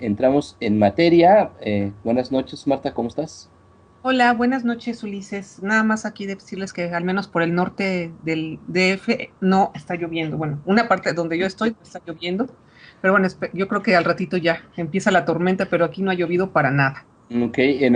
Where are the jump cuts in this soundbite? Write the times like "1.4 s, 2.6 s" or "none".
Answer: 6.4 s